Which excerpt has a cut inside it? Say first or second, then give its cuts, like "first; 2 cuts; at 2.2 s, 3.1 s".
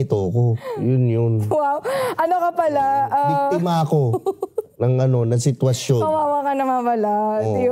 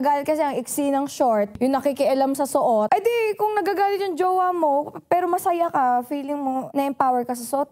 second; 3 cuts; at 1.5 s, 2.9 s, 6.7 s